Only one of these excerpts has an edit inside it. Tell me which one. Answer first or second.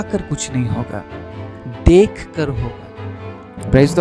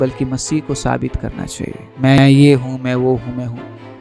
second